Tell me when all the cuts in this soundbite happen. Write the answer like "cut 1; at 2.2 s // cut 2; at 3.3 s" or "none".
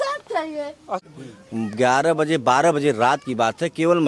cut 1; at 1.0 s